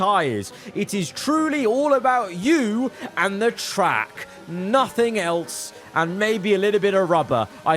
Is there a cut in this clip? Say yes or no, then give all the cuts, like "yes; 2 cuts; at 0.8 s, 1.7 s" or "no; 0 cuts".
no; 0 cuts